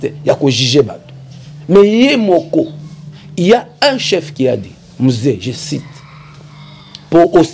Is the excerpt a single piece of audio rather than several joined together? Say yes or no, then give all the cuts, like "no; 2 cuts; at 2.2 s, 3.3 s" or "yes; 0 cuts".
yes; 0 cuts